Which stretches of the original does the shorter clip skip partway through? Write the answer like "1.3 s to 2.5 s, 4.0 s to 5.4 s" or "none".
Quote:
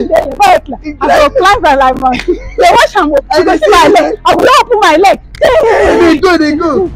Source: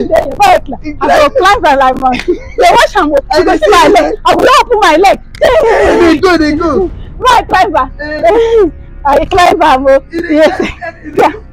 none